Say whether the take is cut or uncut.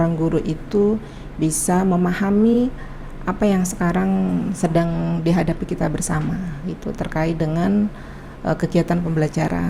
uncut